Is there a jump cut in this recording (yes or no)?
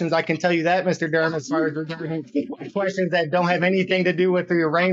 no